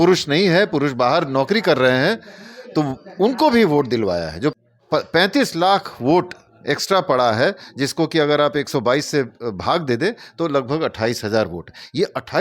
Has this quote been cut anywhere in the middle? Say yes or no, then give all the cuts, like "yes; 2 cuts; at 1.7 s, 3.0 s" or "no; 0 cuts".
yes; 1 cut; at 4.5 s